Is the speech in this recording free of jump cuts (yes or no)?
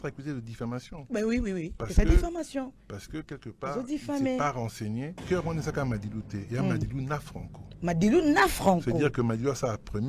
no